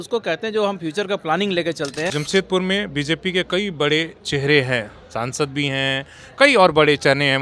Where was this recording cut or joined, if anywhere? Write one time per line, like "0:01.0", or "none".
0:02.2